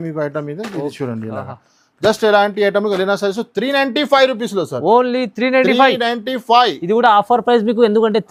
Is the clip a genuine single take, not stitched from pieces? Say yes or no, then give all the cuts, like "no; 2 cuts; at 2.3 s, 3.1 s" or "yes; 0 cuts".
yes; 0 cuts